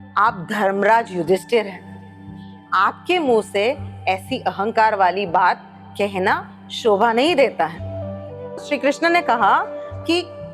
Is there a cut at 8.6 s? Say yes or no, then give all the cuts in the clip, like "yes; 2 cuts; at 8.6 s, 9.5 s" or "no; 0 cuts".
yes; 1 cut; at 8.6 s